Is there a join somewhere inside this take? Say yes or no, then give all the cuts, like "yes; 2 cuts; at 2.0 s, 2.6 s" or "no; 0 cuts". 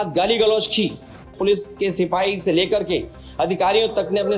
yes; 1 cut; at 1.3 s